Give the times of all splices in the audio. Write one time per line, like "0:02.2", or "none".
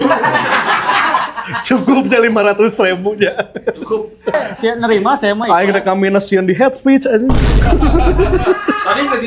0:04.3